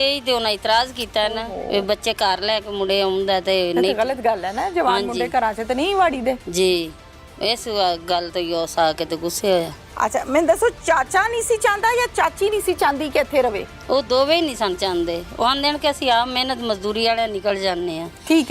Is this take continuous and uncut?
yes; 0 cuts

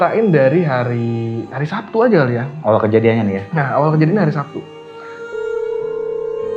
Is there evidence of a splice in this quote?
yes; 1 cut; at 5.2 s

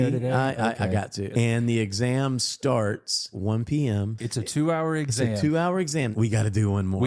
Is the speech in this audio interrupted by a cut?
yes; 4 cuts; at 1.3 s, 3.4 s, 4.2 s, 6.1 s

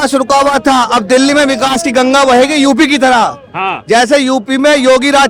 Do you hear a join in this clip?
no; 0 cuts

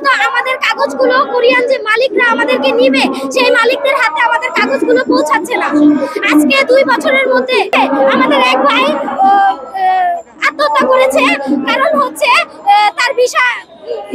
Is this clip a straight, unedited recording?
no; 1 cut; at 7.7 s

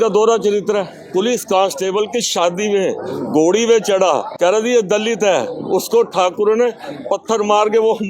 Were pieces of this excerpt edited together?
yes; 2 cuts; at 1.0 s, 4.3 s

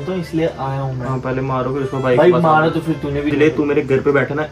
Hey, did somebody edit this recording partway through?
yes; 1 cut; at 3.3 s

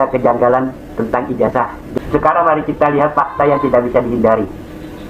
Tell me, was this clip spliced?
yes; 1 cut; at 1.9 s

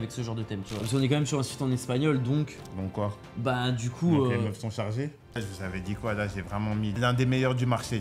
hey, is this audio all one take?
no; 3 cuts; at 0.8 s, 5.4 s, 6.9 s

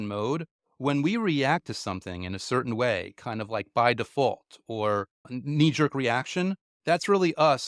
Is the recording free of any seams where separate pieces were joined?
yes; 0 cuts

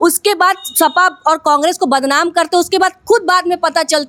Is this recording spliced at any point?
no; 0 cuts

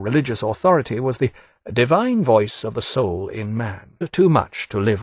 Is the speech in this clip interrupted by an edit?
no; 0 cuts

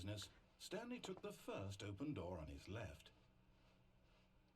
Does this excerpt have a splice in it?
no; 0 cuts

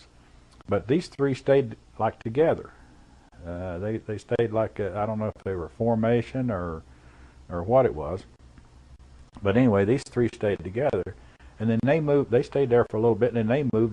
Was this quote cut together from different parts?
yes; 1 cut; at 10.4 s

